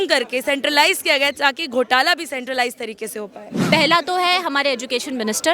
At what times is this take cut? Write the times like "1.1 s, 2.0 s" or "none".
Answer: 3.5 s